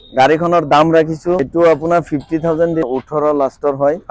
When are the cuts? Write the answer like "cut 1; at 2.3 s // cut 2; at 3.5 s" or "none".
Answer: cut 1; at 1.5 s // cut 2; at 2.8 s